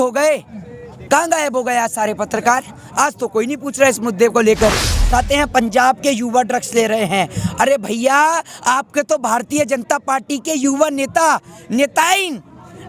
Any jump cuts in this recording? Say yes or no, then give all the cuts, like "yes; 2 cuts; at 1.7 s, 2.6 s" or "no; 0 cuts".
yes; 1 cut; at 5.0 s